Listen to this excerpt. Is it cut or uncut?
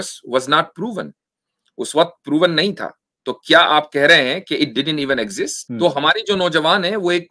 cut